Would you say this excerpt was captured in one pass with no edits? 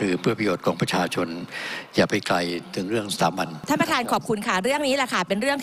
no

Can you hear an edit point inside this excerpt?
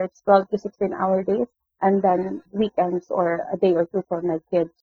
no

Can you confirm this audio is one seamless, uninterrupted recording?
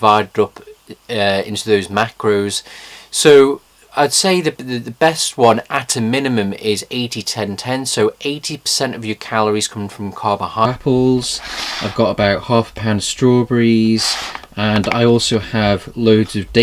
yes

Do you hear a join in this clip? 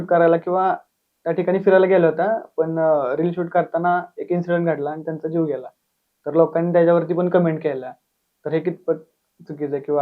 no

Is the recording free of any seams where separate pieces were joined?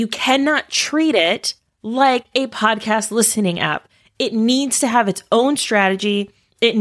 yes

